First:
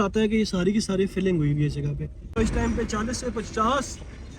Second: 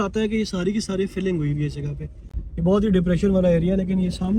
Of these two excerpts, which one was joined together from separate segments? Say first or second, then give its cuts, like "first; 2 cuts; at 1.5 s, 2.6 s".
first; 1 cut; at 2.3 s